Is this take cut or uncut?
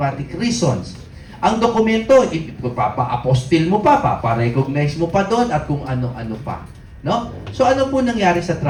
uncut